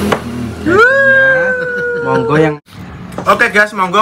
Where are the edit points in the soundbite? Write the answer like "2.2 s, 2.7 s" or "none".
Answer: 2.5 s